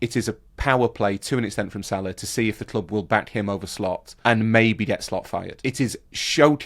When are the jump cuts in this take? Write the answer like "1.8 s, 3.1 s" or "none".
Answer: 4.1 s, 5.7 s